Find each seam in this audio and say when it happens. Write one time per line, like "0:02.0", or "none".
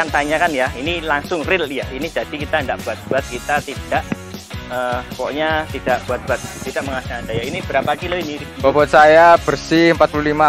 none